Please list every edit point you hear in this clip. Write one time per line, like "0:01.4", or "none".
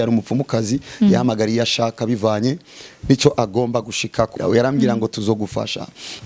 0:04.3